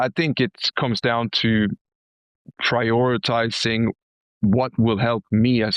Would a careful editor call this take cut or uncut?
uncut